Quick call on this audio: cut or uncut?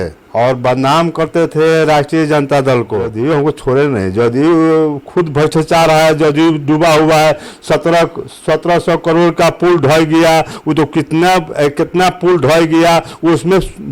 cut